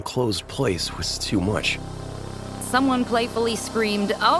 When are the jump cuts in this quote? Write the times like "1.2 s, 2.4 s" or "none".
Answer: 2.4 s